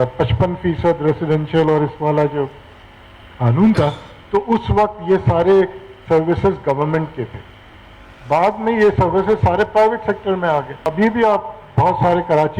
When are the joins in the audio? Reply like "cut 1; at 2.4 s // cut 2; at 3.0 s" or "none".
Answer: cut 1; at 10.8 s